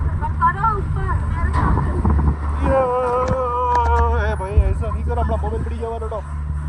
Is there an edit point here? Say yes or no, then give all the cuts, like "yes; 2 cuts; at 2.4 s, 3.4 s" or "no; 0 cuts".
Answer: no; 0 cuts